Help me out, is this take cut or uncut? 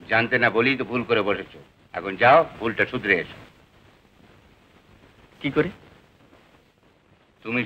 uncut